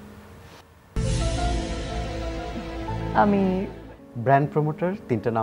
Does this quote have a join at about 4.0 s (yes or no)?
yes